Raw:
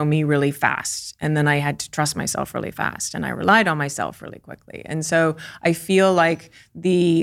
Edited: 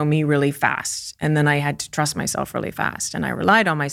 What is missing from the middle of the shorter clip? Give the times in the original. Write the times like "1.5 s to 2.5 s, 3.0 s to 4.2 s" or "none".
none